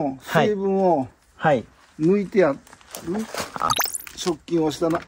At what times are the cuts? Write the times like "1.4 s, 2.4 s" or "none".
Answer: 3.7 s